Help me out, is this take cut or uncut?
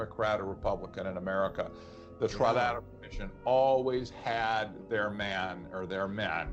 uncut